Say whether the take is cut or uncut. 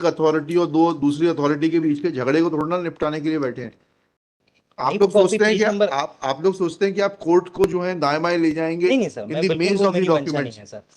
cut